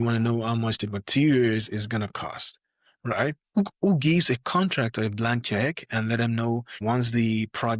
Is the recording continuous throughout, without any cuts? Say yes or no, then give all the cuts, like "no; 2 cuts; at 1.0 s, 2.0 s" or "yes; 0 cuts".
no; 2 cuts; at 3.4 s, 6.8 s